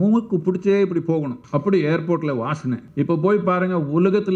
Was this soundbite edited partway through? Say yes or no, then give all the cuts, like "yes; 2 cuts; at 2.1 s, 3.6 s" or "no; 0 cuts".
yes; 2 cuts; at 1.4 s, 2.9 s